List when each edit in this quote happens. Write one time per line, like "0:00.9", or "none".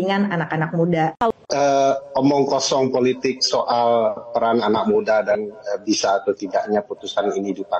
0:01.3